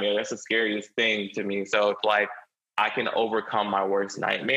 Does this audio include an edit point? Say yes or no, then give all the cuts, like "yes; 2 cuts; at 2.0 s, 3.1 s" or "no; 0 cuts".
no; 0 cuts